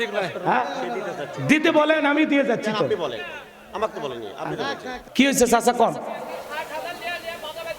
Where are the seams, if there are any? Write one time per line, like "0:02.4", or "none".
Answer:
0:04.9